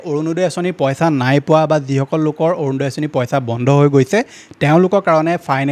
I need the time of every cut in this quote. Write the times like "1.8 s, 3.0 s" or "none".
none